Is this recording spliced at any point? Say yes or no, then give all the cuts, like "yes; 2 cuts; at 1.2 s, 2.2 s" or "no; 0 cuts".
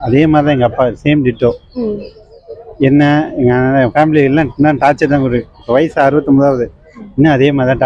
no; 0 cuts